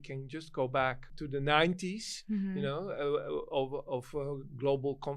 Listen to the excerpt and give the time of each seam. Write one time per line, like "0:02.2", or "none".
0:01.1